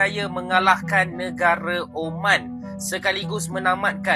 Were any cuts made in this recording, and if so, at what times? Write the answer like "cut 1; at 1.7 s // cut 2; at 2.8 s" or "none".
none